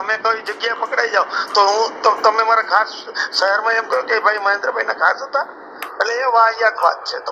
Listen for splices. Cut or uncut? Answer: uncut